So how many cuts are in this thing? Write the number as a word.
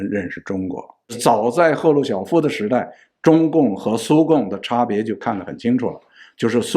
one